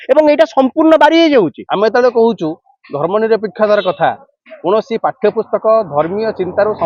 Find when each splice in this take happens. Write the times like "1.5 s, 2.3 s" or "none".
1.6 s